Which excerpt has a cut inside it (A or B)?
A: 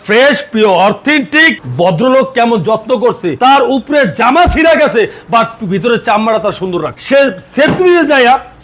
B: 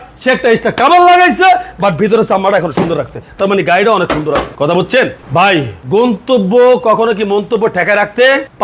A